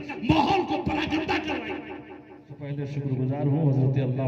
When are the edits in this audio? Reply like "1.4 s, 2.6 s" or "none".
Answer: 2.8 s